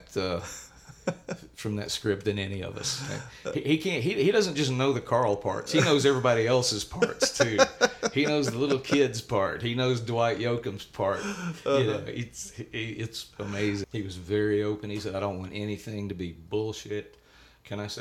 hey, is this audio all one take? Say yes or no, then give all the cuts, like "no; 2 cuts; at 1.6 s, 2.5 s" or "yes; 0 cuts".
no; 1 cut; at 13.8 s